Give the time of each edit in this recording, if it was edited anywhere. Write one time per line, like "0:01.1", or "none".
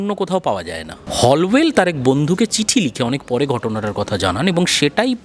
0:00.9